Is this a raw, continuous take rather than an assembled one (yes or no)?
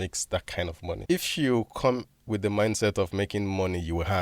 no